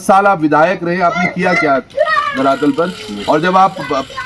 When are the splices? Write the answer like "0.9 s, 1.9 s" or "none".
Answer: none